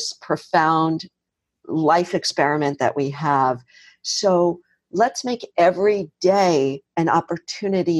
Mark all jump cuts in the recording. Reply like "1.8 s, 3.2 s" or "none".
none